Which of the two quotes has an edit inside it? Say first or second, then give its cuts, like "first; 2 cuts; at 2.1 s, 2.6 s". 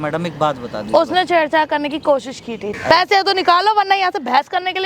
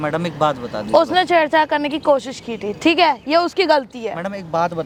first; 1 cut; at 2.7 s